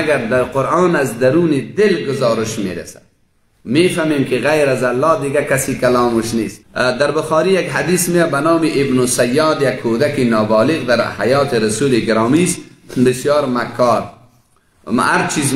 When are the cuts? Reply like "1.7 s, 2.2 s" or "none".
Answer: 6.6 s